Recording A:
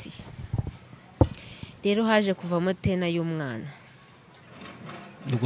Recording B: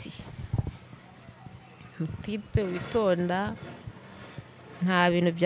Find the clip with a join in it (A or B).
A